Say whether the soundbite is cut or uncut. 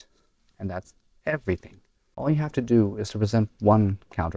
cut